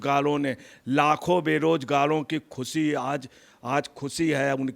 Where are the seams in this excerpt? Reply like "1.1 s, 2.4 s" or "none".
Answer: none